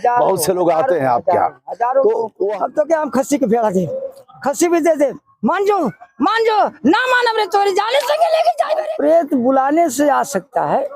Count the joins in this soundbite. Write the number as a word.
two